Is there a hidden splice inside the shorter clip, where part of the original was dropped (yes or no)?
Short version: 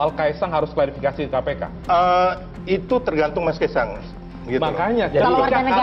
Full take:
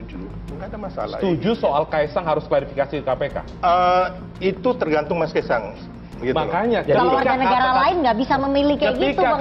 no